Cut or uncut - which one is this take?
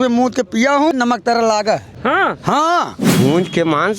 cut